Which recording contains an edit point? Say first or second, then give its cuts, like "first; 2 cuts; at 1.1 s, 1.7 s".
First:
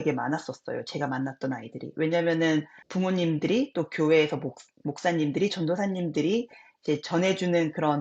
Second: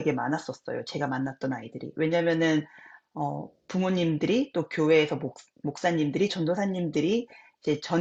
first; 1 cut; at 2.8 s